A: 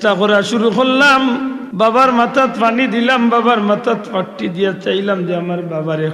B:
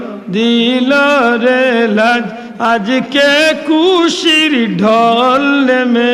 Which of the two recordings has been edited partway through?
A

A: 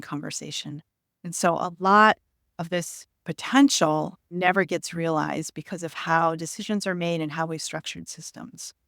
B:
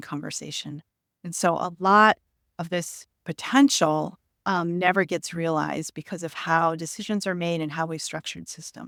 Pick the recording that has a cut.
A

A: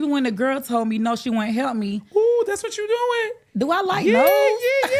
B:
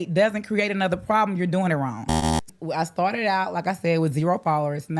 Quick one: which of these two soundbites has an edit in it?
B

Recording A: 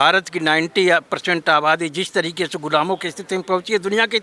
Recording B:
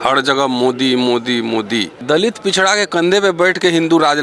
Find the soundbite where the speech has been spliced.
B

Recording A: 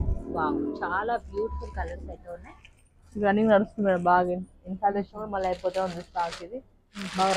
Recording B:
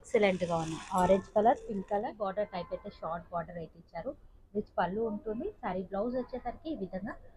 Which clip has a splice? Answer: B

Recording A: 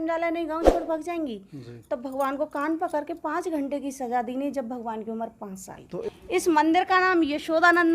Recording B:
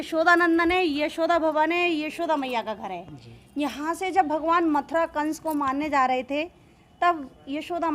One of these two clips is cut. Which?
A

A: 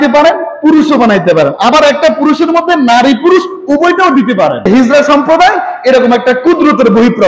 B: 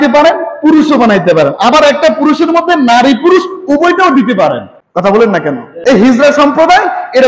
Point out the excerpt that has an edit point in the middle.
A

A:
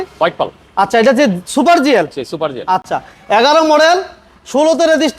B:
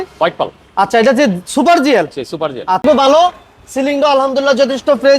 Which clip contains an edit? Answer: B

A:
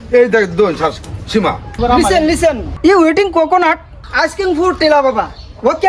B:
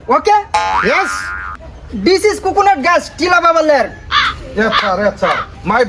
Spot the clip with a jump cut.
A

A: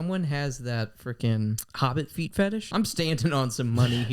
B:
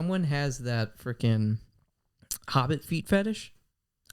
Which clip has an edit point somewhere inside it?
A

